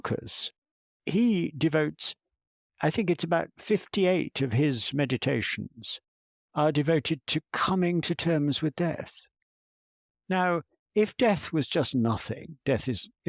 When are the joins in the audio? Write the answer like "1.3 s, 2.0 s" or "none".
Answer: 0.9 s